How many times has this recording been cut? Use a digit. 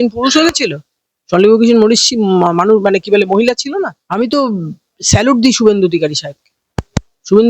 1